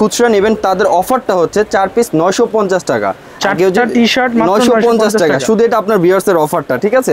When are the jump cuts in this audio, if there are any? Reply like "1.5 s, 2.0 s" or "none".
none